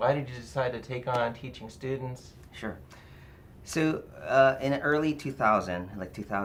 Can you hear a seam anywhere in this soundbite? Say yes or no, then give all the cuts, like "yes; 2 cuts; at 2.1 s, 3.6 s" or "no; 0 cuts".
no; 0 cuts